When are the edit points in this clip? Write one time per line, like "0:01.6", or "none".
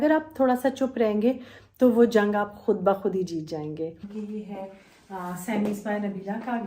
0:04.1